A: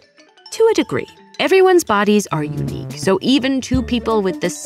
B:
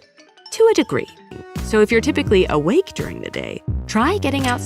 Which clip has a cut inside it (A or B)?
B